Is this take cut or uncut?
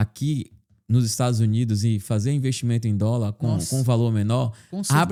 uncut